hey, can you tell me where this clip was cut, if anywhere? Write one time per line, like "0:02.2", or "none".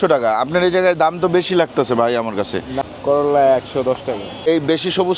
0:02.7
0:04.5